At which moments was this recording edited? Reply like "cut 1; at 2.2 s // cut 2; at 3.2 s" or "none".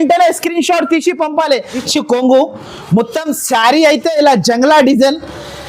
cut 1; at 1.9 s